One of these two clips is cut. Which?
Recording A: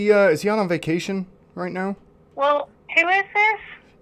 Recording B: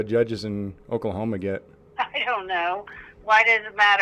B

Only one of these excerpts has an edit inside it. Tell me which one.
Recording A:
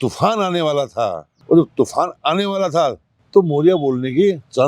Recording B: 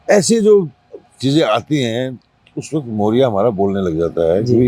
A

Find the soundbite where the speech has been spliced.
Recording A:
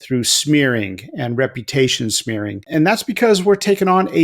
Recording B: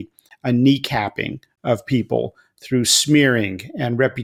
A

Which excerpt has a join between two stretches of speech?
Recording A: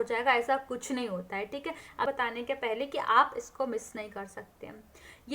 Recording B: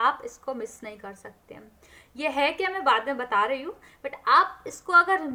A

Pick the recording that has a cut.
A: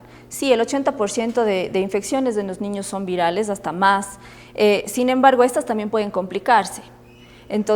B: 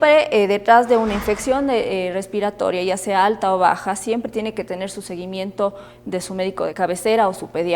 B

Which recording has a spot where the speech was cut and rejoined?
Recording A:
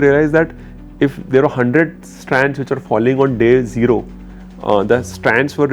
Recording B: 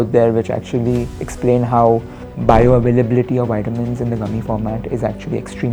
B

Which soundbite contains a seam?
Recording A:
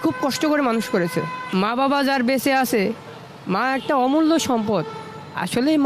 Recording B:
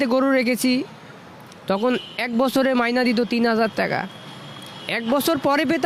A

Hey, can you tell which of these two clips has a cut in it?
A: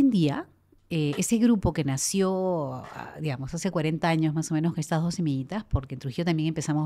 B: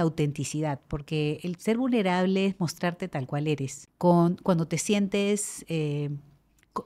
B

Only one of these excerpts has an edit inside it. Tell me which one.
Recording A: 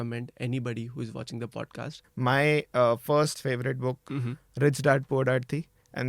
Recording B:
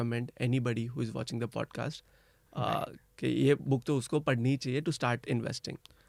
A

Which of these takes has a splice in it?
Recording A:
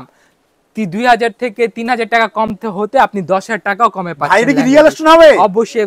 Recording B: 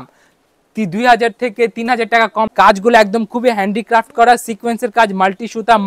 B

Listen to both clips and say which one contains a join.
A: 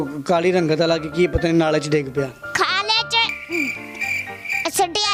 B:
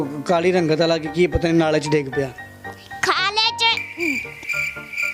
A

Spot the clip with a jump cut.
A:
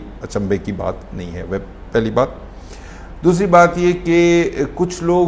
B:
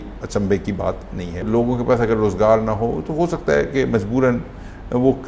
B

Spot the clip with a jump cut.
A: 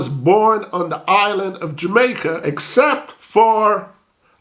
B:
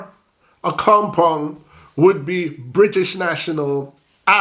A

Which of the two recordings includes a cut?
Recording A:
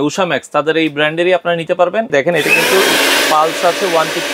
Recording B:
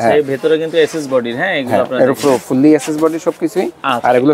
A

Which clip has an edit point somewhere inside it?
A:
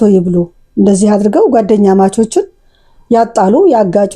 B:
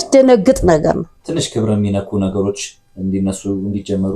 B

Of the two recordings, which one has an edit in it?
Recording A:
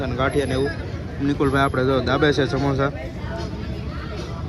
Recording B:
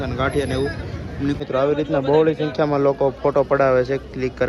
B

